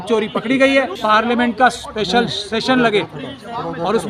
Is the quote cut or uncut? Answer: cut